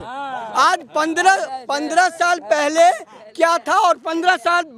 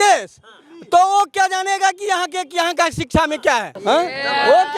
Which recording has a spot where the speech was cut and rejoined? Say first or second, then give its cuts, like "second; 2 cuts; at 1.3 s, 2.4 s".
second; 1 cut; at 3.7 s